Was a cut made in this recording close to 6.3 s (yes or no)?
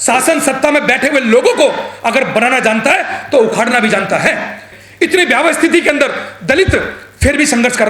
no